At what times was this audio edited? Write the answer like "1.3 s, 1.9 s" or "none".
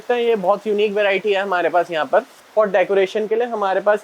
2.4 s

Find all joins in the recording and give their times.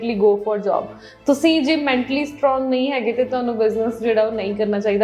none

